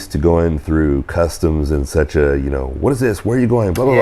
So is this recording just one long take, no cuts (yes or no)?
yes